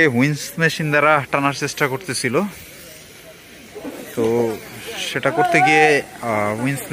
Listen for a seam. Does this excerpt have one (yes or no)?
no